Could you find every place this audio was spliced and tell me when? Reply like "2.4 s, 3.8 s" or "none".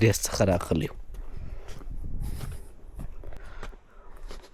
3.4 s